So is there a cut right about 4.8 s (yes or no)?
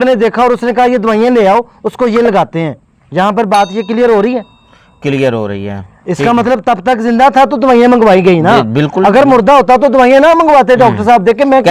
no